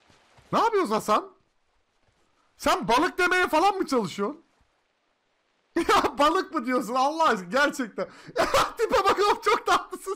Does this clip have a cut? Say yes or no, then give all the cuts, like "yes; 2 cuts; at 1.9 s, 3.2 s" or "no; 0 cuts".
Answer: no; 0 cuts